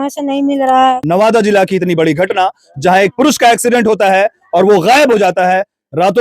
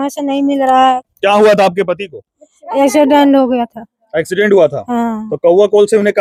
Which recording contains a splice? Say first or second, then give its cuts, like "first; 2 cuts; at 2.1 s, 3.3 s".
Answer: first; 1 cut; at 1.0 s